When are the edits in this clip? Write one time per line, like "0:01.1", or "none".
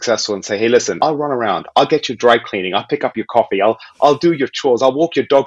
0:00.9